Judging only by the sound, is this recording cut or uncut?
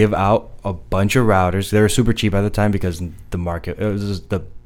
uncut